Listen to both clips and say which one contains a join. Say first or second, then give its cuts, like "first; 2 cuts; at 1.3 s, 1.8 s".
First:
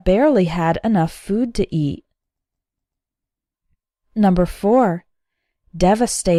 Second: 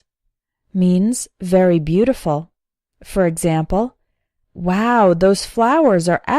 second; 1 cut; at 5.4 s